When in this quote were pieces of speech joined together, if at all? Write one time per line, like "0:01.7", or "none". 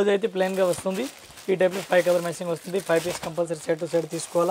none